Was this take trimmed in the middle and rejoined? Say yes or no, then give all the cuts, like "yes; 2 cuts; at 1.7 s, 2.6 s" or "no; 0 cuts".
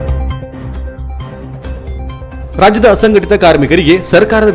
yes; 1 cut; at 1.6 s